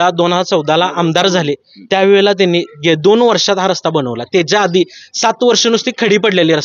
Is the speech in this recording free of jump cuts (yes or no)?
yes